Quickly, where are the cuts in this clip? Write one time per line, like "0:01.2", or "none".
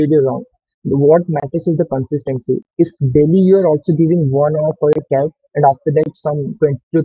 none